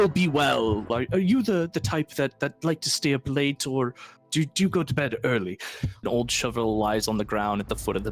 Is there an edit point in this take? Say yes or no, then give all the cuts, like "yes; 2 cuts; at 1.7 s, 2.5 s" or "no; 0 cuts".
yes; 2 cuts; at 0.9 s, 6.0 s